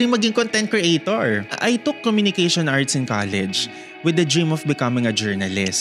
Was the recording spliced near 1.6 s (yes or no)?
yes